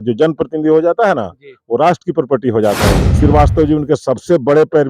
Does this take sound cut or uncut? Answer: cut